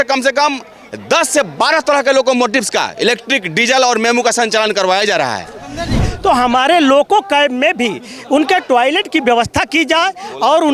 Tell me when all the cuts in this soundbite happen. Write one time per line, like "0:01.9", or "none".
0:06.1